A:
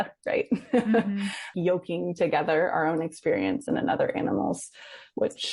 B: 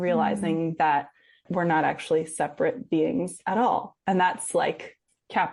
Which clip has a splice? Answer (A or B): A